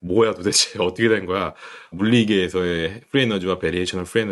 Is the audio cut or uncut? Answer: cut